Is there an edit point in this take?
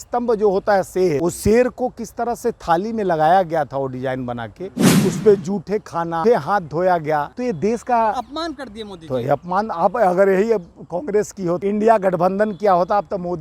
yes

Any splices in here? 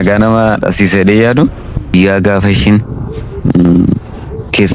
yes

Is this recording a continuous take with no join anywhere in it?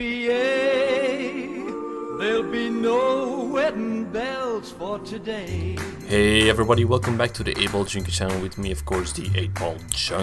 yes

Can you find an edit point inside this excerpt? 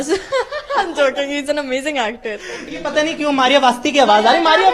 yes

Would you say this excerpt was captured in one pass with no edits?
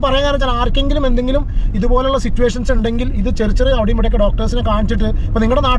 yes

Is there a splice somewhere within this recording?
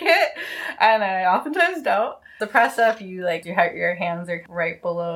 yes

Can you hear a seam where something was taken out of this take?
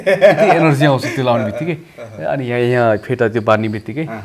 no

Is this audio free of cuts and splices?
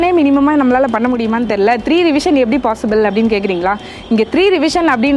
yes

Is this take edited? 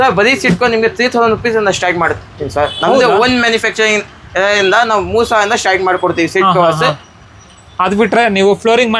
no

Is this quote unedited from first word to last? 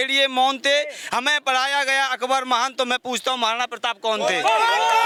yes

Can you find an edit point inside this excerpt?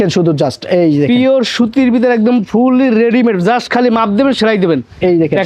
no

